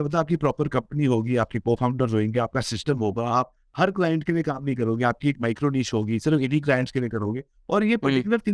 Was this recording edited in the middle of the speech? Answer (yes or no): no